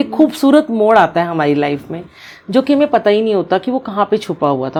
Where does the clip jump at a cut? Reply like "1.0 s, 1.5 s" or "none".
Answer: none